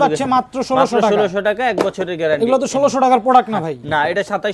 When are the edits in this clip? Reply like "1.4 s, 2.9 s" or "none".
none